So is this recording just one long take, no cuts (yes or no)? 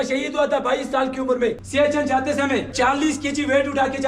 no